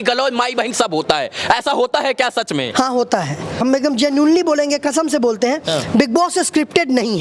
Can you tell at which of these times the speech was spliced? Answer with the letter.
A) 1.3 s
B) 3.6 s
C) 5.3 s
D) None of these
B